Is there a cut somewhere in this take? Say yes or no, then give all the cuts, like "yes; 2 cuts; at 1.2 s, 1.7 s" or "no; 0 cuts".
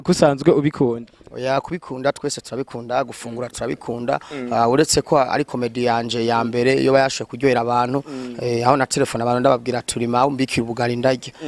no; 0 cuts